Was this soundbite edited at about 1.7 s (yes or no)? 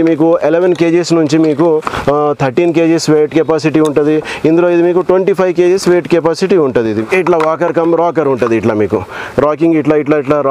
no